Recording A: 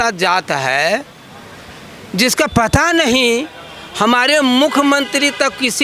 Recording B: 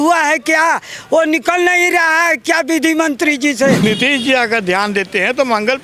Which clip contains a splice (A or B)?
B